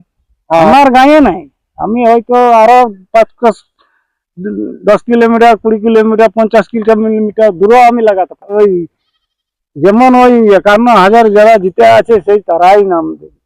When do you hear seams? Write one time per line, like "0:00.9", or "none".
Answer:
0:08.5